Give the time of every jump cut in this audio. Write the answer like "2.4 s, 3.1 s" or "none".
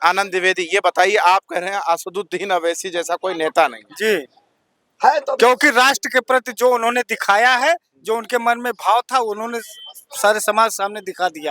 none